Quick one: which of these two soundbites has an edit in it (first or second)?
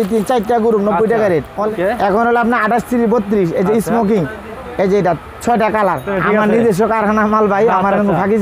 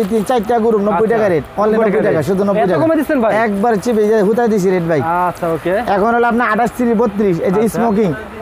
first